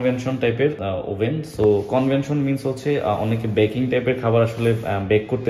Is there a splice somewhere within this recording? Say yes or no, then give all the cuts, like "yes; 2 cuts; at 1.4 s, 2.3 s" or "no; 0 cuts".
no; 0 cuts